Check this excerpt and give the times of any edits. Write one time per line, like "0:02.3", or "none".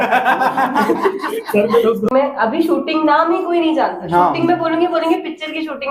0:02.1